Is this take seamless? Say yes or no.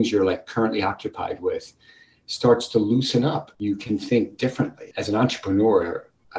no